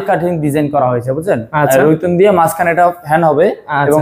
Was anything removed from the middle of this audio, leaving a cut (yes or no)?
no